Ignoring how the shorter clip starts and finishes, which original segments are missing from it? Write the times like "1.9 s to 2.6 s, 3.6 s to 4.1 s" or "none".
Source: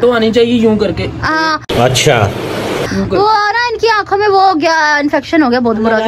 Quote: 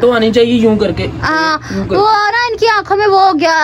1.7 s to 2.9 s